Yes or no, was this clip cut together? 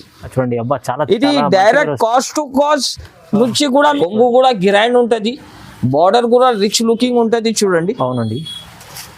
yes